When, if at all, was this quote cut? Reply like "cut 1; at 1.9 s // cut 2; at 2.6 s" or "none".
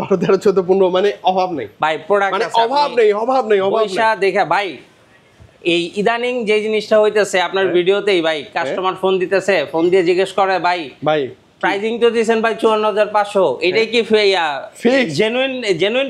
none